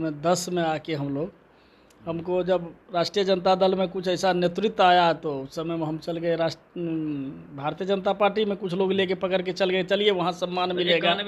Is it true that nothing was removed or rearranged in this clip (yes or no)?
yes